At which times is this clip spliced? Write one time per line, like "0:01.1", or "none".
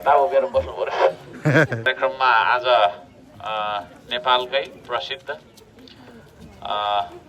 0:01.9